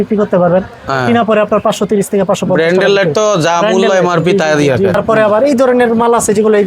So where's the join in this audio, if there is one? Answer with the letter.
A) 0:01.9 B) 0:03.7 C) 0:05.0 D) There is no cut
C